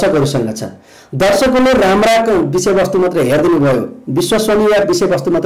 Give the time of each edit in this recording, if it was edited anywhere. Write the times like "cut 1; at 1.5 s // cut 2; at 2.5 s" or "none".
none